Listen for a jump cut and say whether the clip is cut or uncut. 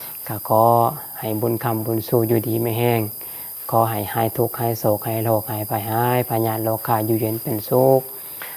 uncut